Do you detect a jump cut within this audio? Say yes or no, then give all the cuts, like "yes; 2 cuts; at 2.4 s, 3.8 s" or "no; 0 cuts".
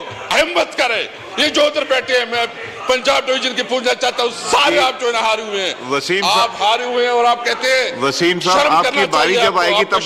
no; 0 cuts